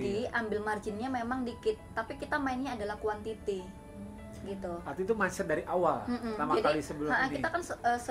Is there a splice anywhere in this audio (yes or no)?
no